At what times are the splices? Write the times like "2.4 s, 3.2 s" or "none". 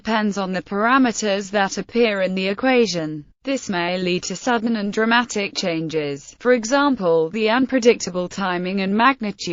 5.9 s